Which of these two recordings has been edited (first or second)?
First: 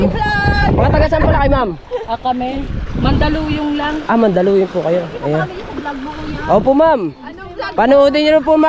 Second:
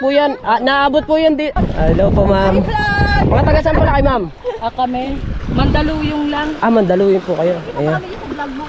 second